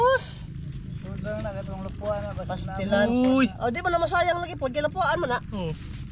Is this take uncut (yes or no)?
yes